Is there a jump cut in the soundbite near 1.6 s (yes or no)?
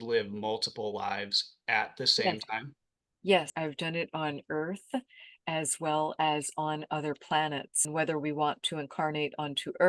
no